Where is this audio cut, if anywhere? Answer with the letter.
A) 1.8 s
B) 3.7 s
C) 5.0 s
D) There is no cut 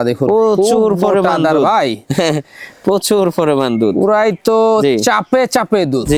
D